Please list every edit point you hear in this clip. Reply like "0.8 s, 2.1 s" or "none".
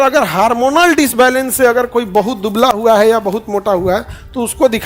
none